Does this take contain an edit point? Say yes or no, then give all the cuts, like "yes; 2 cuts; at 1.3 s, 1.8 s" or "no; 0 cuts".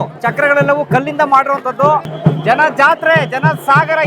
yes; 1 cut; at 2.1 s